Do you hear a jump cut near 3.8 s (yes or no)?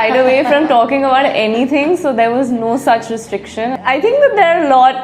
yes